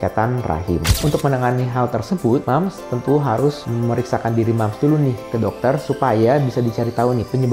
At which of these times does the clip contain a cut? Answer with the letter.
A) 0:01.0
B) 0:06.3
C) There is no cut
A